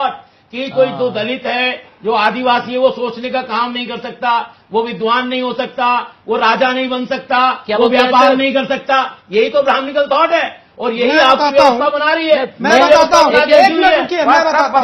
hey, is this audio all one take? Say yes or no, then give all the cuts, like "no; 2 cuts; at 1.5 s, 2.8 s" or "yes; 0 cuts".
yes; 0 cuts